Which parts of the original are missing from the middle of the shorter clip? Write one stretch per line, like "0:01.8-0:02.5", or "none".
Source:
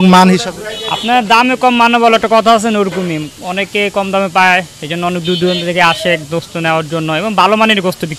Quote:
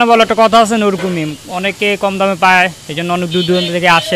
none